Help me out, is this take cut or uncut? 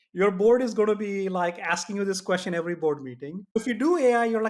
cut